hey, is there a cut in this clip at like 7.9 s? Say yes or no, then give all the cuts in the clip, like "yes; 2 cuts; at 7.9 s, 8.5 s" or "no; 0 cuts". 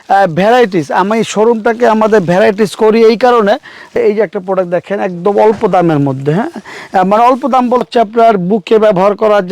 yes; 2 cuts; at 4.0 s, 7.9 s